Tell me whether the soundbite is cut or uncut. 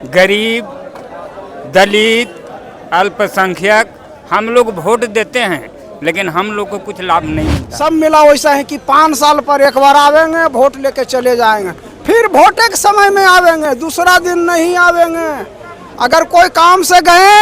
cut